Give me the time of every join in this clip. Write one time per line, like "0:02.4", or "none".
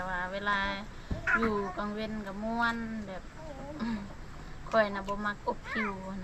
none